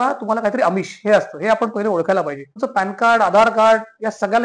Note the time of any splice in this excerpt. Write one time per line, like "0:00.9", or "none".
0:02.6